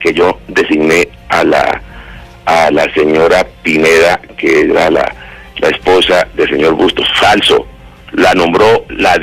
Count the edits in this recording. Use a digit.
1